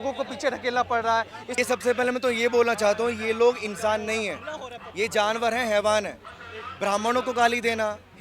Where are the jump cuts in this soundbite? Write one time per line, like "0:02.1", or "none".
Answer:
0:01.6